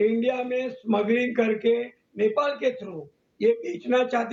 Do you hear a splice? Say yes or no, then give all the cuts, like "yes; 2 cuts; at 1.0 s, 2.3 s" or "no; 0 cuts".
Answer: no; 0 cuts